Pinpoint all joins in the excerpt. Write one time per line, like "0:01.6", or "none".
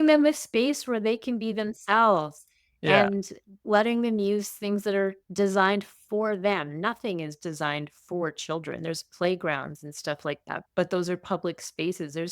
0:03.6
0:10.5